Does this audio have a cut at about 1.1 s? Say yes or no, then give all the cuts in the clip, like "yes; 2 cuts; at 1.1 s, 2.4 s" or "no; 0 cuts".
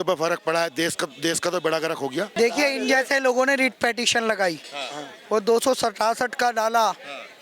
no; 1 cut; at 2.3 s